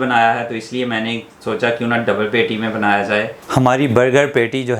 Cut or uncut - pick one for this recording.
cut